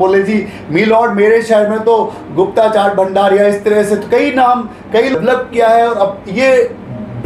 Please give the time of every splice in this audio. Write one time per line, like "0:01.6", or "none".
0:05.1